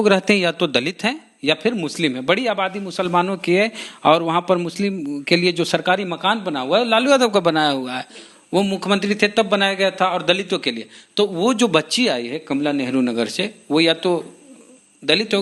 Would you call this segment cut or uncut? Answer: uncut